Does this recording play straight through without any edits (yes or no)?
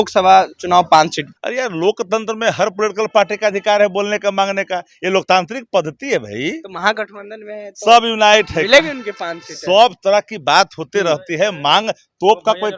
no